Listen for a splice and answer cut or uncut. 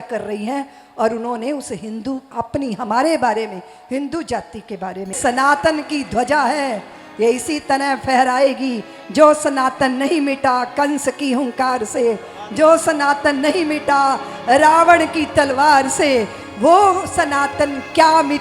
cut